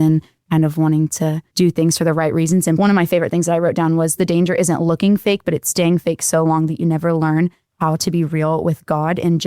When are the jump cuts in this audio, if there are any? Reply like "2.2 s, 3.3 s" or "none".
1.4 s, 2.8 s